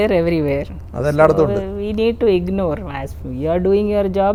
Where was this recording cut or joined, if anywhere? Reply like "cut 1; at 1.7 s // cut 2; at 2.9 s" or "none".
none

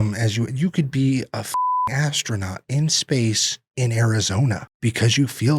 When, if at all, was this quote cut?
cut 1; at 4.7 s

